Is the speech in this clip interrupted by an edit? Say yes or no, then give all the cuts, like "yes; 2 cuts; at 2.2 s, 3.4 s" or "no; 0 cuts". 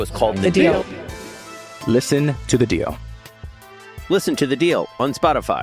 no; 0 cuts